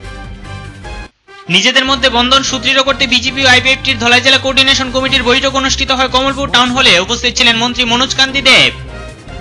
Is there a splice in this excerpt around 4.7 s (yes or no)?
no